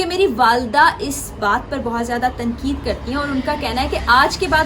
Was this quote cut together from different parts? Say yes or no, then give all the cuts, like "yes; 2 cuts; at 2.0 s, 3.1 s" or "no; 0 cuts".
no; 0 cuts